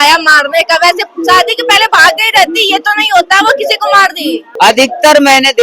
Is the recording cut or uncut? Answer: cut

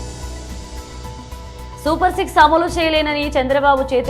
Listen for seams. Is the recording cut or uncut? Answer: cut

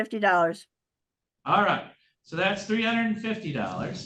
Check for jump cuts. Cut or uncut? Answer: uncut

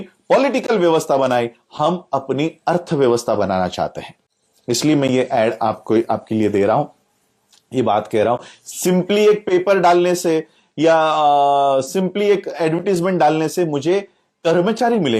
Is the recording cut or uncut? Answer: uncut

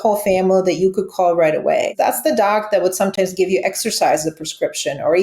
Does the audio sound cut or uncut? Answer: cut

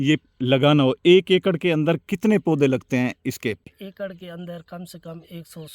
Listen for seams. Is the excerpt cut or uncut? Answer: cut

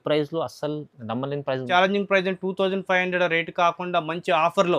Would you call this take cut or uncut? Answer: cut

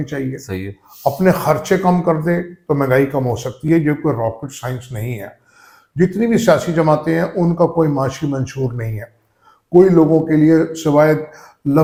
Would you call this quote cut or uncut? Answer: uncut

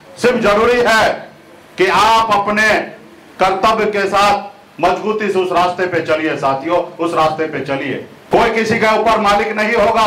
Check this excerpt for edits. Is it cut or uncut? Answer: cut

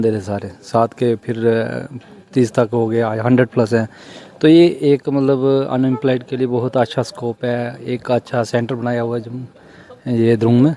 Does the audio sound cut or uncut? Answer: uncut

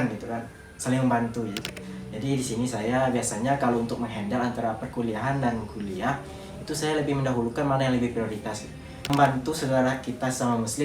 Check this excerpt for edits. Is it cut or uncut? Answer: cut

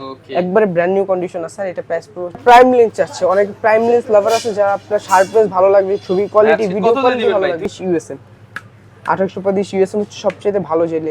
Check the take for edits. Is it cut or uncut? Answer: cut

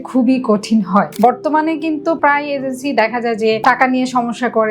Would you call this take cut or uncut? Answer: cut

